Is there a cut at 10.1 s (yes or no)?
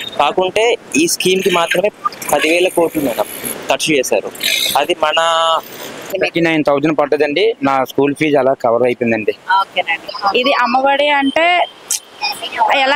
yes